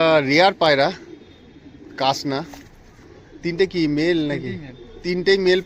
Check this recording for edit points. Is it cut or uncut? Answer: uncut